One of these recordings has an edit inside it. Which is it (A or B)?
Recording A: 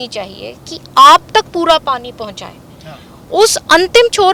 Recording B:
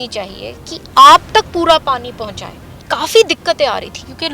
B